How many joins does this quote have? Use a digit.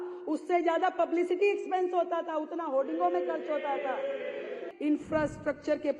1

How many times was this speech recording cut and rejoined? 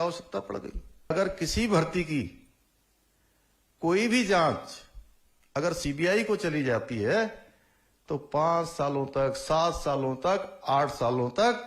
1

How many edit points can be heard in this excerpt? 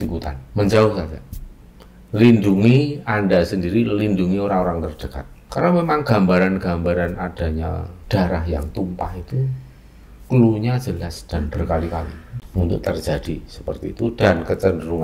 1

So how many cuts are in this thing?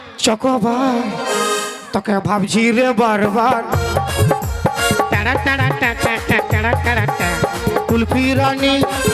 0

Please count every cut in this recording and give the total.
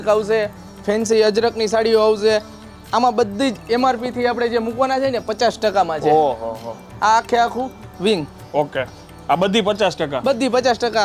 0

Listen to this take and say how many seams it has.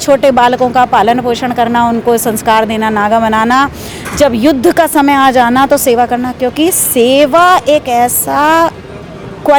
0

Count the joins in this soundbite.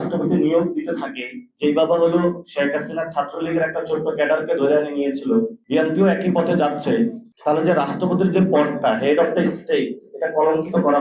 2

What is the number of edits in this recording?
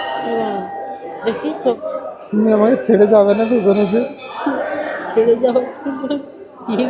1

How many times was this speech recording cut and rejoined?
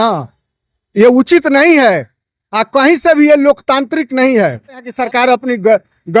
1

